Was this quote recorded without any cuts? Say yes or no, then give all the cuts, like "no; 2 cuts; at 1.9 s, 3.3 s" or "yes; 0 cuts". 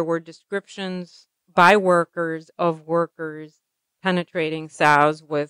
no; 1 cut; at 1.4 s